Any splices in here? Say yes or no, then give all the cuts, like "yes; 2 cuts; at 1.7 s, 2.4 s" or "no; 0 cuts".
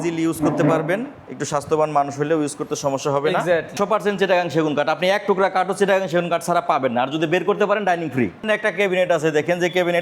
yes; 2 cuts; at 3.7 s, 8.5 s